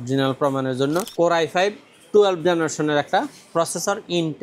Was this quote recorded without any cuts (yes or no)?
no